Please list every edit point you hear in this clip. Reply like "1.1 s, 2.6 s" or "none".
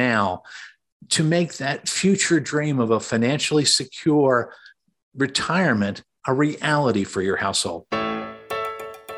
7.8 s